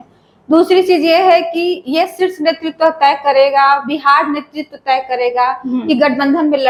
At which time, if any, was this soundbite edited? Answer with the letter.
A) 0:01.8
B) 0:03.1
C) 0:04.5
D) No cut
D